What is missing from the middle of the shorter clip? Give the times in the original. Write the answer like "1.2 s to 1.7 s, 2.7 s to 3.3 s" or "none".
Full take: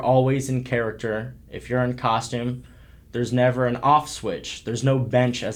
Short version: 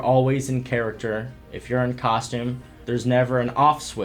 2.7 s to 3.0 s